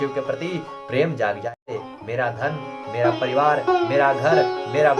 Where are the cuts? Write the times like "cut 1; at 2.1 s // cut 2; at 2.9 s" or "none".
cut 1; at 1.7 s